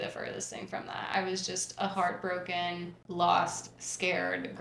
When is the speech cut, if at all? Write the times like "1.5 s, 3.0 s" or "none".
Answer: 2.9 s